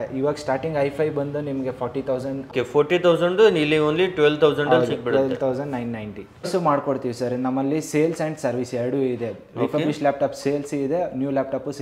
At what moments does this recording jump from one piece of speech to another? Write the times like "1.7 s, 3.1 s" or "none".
2.5 s, 6.5 s